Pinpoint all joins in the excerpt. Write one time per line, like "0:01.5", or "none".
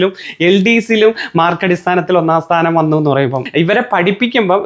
0:03.4